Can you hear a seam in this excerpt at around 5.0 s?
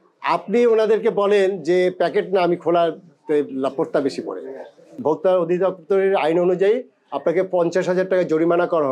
yes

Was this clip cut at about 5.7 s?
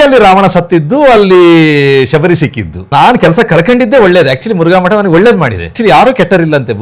yes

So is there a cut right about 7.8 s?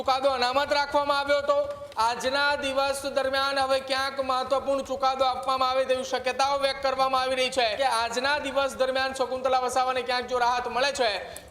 yes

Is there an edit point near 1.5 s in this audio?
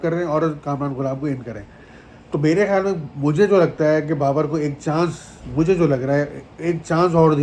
no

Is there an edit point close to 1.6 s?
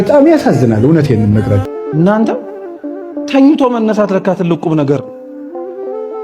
yes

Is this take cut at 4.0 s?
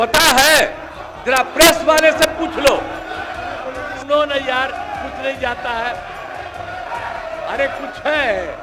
yes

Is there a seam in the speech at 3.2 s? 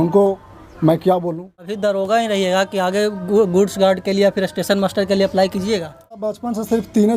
no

